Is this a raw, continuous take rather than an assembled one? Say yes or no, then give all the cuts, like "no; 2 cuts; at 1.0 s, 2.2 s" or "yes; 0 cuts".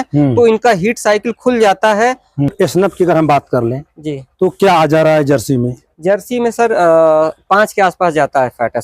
no; 1 cut; at 2.5 s